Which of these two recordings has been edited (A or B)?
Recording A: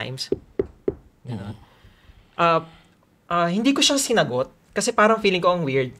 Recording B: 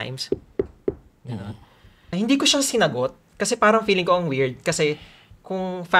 B